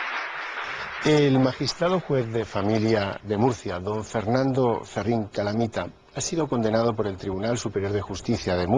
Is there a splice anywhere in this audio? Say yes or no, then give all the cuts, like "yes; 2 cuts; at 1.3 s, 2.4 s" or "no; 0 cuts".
yes; 1 cut; at 5.5 s